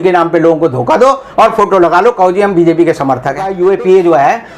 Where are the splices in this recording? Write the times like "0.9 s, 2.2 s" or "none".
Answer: 3.5 s